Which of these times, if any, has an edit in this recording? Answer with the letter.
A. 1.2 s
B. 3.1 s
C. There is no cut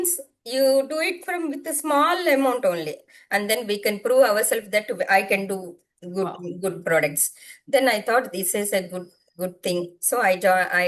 B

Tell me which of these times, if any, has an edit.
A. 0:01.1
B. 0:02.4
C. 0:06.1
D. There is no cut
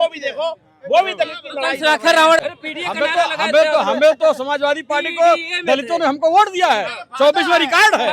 B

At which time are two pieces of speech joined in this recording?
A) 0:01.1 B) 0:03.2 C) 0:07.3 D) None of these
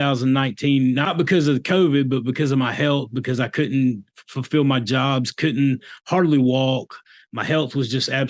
A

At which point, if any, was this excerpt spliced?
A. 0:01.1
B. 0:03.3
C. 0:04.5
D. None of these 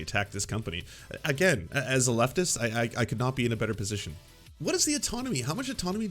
C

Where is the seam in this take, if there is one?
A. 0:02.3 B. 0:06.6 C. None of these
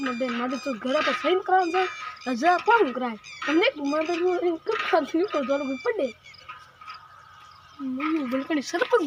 C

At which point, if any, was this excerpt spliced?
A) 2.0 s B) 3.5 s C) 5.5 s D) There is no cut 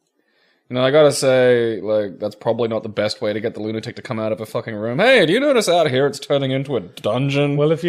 A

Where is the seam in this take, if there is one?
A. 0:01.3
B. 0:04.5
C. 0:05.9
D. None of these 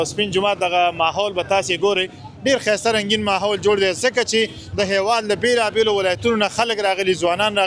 D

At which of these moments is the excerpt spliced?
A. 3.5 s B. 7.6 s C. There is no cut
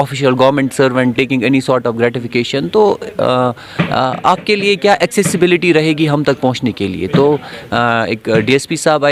C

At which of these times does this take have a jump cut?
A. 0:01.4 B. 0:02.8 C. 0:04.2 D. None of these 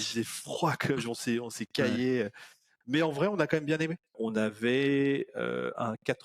C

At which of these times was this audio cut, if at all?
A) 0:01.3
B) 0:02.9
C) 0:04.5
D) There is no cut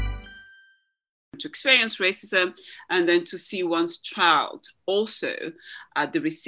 A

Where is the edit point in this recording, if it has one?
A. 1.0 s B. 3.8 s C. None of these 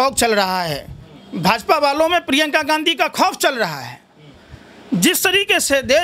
C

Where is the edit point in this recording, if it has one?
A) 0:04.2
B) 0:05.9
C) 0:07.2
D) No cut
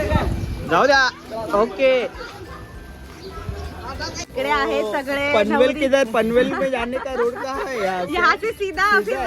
A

